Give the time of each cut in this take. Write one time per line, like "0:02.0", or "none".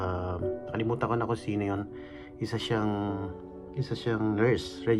none

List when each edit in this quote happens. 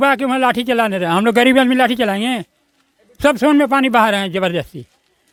none

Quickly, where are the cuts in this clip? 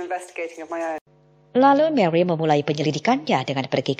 none

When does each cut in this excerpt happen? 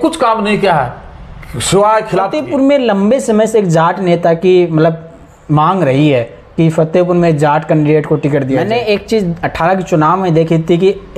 0:02.4
0:08.6

